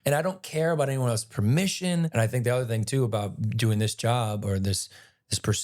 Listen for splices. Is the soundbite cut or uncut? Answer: cut